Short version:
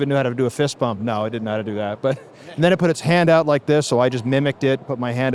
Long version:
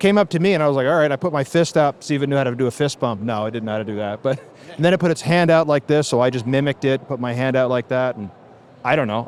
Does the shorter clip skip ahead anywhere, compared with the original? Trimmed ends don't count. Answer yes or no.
no